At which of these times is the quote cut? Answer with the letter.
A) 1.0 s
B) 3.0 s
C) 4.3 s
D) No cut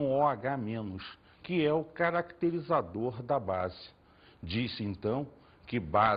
A